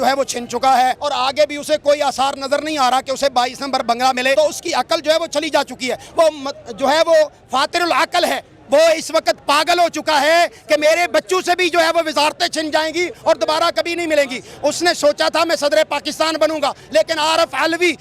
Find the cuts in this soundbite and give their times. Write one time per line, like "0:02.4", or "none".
0:01.0
0:04.3

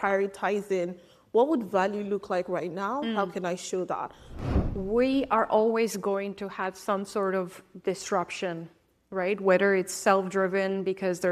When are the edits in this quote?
0:04.3

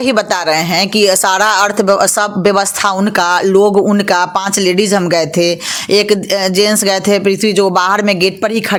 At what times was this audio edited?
none

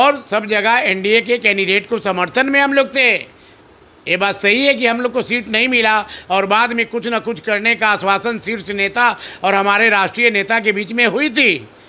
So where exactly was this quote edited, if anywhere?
none

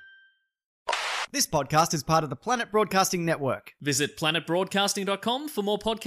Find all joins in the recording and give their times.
0:01.0

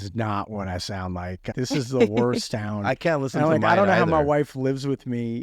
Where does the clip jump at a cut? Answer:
0:01.5

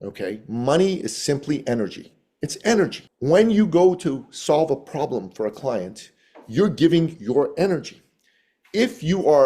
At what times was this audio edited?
none

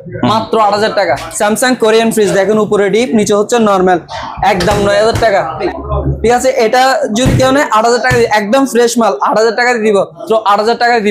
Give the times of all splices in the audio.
0:01.3
0:05.7
0:10.2

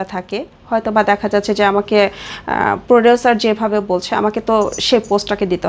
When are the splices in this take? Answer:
none

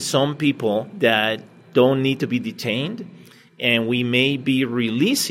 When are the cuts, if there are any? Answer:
0:00.9

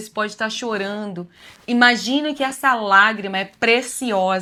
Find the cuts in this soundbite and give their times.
none

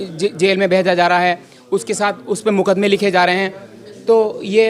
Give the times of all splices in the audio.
none

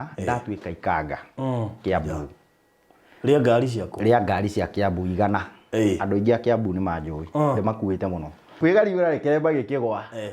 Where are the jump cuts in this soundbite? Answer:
0:08.5

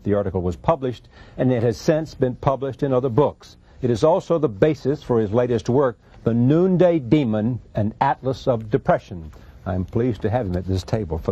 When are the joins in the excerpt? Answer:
none

